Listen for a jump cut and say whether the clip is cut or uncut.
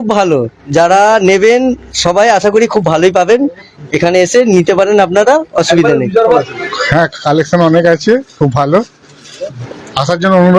cut